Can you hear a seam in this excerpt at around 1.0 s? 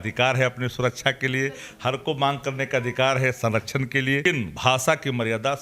no; 1 cut; at 4.2 s

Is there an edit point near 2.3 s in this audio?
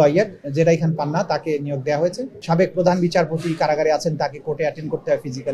yes; 1 cut; at 2.3 s

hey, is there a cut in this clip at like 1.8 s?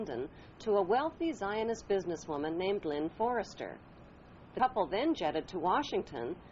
no; 1 cut; at 4.5 s

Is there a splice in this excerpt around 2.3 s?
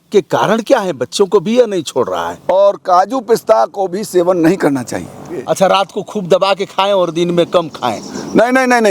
yes; 2 cuts; at 2.3 s, 5.4 s

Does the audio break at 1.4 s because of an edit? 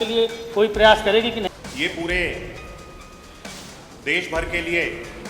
yes; 1 cut; at 1.4 s

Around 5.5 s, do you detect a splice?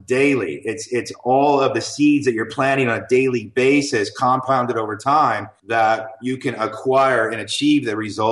yes; 1 cut; at 5.5 s

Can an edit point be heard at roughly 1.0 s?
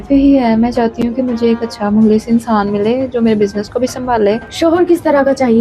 no; 1 cut; at 4.5 s

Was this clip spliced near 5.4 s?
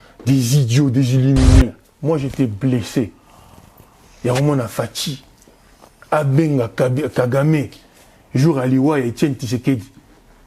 no; 1 cut; at 1.9 s

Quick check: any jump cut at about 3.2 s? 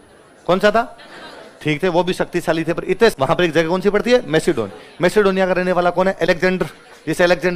yes; 1 cut; at 3.2 s

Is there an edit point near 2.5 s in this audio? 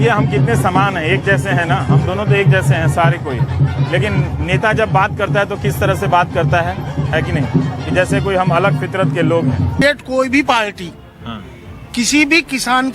no; 1 cut; at 9.8 s

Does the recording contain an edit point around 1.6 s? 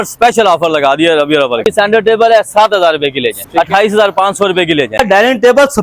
yes; 3 cuts; at 1.6 s, 3.4 s, 5.0 s

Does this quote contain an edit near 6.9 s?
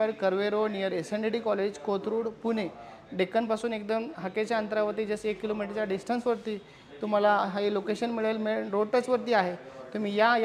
no; 0 cuts

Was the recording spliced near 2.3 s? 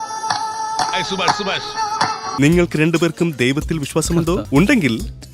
yes; 1 cut; at 2.3 s

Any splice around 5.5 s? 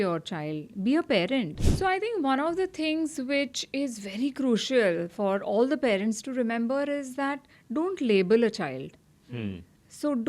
no; 1 cut; at 1.6 s

